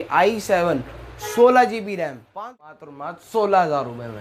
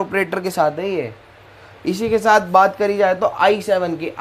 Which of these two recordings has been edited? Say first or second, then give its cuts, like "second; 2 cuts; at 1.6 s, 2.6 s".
first; 1 cut; at 2.2 s